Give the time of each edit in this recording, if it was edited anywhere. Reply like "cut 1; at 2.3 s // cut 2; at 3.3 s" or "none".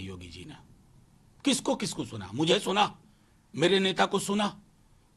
none

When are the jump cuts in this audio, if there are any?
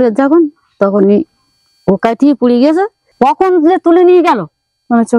cut 1; at 3.1 s

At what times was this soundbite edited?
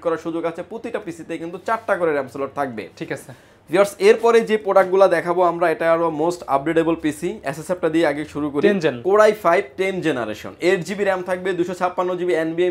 none

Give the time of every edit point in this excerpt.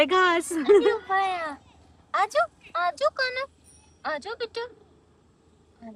none

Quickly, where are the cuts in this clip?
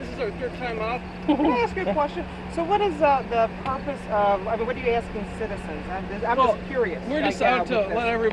cut 1; at 4.6 s

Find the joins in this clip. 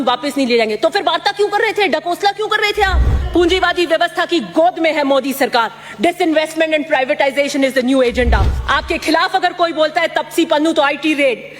cut 1; at 3.3 s // cut 2; at 8.5 s

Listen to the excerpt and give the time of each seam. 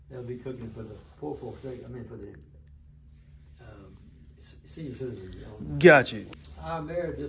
cut 1; at 6.3 s

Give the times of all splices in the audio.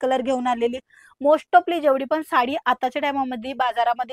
none

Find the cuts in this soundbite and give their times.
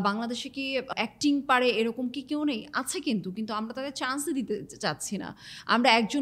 cut 1; at 0.9 s

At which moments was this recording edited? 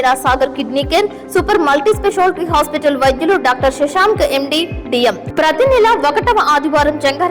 cut 1; at 5.2 s

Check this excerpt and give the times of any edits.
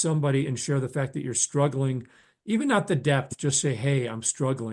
none

